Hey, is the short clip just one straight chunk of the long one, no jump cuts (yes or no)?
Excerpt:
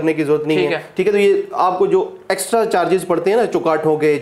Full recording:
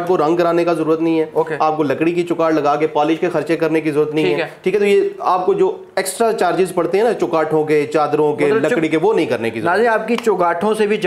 yes